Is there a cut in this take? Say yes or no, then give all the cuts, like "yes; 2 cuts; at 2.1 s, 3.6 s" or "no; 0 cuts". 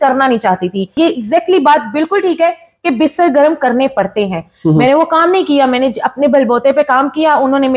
yes; 1 cut; at 0.9 s